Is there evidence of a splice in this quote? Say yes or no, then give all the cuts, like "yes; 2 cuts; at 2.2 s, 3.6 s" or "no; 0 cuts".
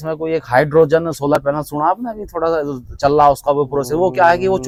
no; 0 cuts